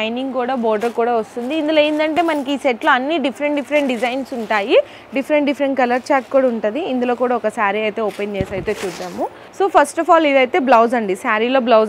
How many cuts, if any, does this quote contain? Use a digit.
0